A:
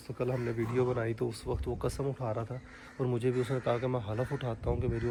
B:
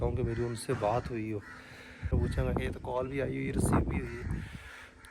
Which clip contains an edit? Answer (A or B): B